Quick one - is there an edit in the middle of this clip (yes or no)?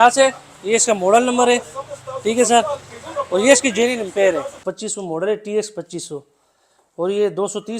yes